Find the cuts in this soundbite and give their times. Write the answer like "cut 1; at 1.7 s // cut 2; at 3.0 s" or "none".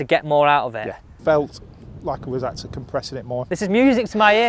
cut 1; at 1.1 s // cut 2; at 3.5 s